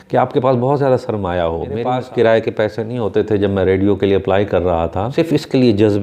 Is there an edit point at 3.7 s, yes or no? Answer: no